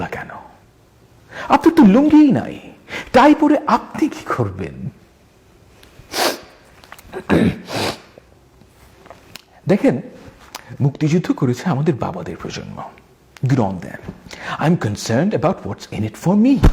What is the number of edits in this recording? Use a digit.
0